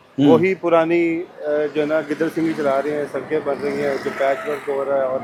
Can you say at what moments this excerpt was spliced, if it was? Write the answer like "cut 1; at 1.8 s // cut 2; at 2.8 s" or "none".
none

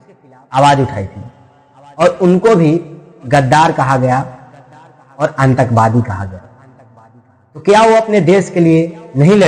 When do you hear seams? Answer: none

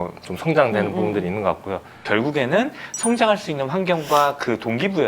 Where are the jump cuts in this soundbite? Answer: cut 1; at 1.9 s

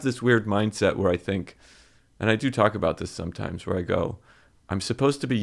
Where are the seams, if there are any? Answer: none

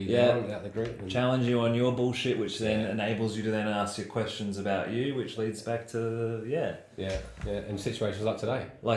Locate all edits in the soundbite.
none

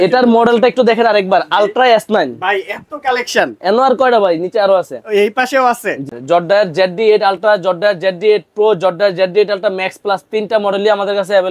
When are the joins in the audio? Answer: cut 1; at 6.2 s

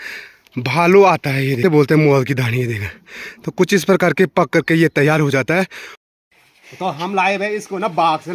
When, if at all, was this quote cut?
cut 1; at 1.6 s // cut 2; at 5.9 s

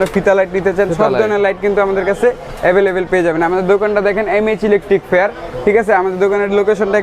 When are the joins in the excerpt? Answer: none

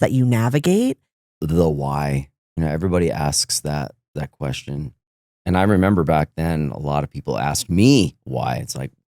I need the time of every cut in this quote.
cut 1; at 1.4 s

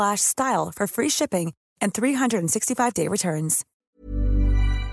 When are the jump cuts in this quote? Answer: cut 1; at 3.7 s

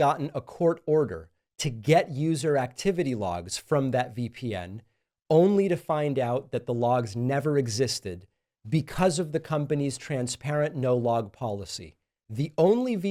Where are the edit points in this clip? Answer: none

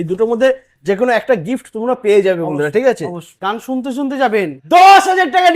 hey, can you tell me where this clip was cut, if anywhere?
cut 1; at 3.4 s // cut 2; at 4.6 s

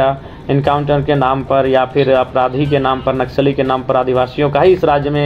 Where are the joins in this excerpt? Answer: none

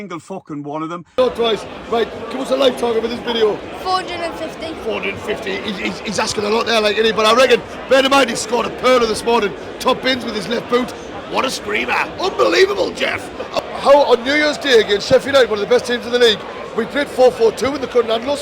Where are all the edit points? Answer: cut 1; at 1.2 s // cut 2; at 13.5 s

